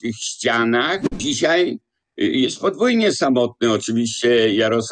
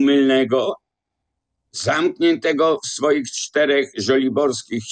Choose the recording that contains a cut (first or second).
first